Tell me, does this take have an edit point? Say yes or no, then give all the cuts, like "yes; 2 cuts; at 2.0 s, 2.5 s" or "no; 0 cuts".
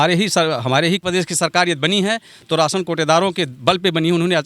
yes; 1 cut; at 1.0 s